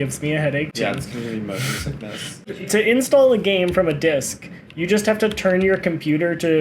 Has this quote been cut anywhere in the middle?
yes; 1 cut; at 2.4 s

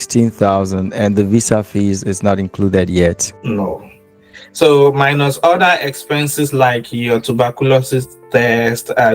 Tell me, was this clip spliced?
no; 0 cuts

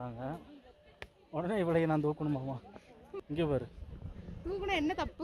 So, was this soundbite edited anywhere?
yes; 1 cut; at 3.0 s

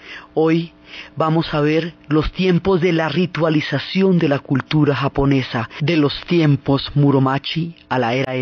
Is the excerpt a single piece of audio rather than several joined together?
yes; 0 cuts

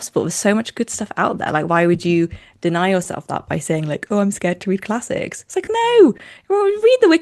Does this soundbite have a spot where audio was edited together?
no; 0 cuts

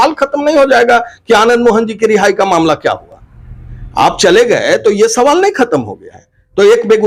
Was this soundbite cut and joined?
no; 0 cuts

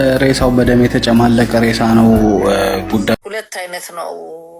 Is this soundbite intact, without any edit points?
no; 2 cuts; at 1.5 s, 3.1 s

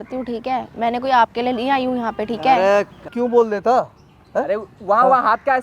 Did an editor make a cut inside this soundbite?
yes; 1 cut; at 3.1 s

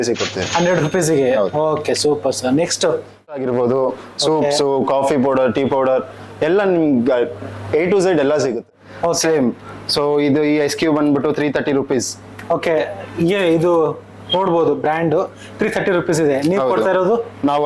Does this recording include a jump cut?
yes; 2 cuts; at 3.4 s, 8.8 s

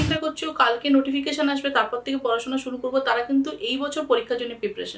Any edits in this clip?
no; 0 cuts

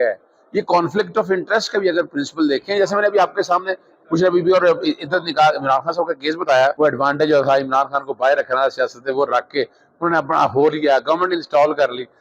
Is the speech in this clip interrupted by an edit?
yes; 1 cut; at 6.7 s

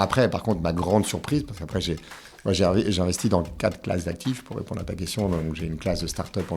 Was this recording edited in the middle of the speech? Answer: no; 0 cuts

